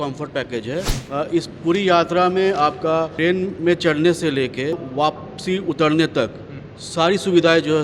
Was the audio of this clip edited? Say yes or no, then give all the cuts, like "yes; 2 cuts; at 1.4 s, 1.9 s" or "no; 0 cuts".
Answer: yes; 3 cuts; at 1.0 s, 3.1 s, 4.8 s